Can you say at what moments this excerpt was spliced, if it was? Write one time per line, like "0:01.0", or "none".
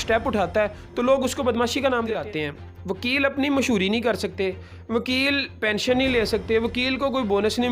0:02.2